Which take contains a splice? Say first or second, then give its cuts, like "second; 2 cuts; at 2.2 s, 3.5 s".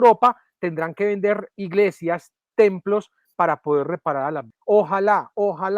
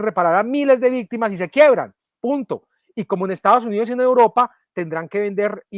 first; 1 cut; at 4.5 s